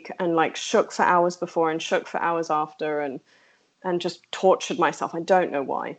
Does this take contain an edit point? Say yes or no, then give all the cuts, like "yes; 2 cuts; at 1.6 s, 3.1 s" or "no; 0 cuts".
no; 0 cuts